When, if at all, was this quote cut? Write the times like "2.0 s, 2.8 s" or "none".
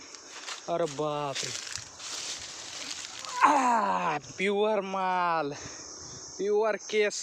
none